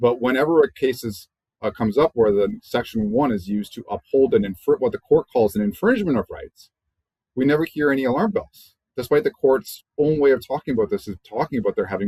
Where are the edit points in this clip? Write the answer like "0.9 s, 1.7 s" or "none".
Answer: none